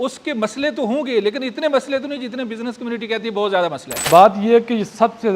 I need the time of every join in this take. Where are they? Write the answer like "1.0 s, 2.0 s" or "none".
3.9 s